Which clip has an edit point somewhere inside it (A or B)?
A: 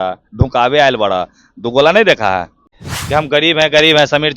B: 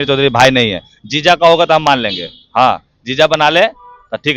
A